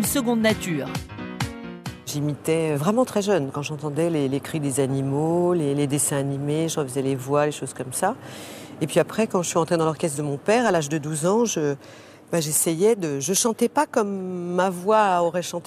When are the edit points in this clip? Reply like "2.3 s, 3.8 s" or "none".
none